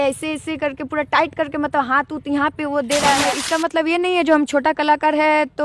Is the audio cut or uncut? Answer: cut